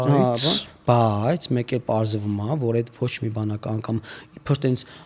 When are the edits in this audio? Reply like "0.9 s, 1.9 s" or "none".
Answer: none